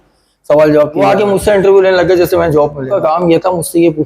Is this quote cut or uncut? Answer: cut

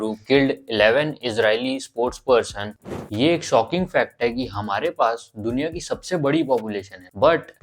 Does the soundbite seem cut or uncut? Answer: cut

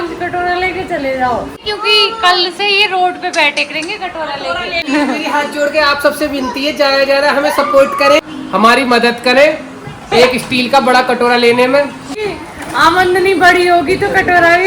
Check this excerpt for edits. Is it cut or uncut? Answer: cut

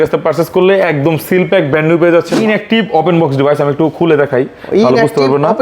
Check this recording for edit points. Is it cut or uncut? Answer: cut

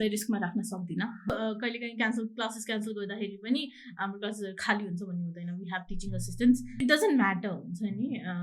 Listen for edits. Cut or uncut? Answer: cut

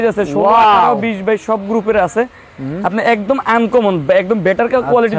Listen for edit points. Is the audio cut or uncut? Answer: uncut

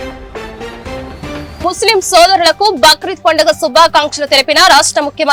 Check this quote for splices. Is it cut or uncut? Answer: uncut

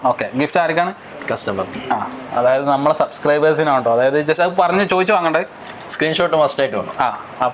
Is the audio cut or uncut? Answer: uncut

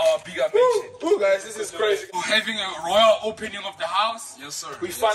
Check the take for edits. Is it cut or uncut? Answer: cut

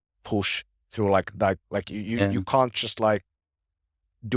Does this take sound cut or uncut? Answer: uncut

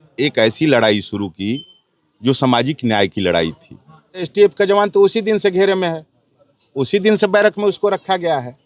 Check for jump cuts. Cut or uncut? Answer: cut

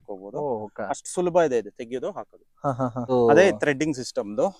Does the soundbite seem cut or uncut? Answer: uncut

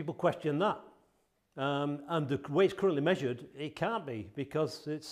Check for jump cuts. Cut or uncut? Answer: uncut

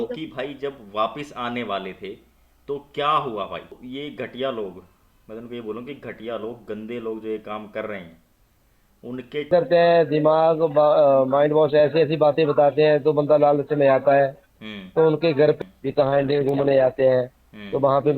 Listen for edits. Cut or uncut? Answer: cut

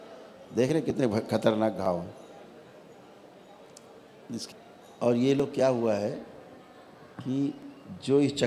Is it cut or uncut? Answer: cut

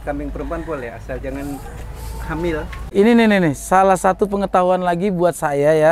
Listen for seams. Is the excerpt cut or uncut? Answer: cut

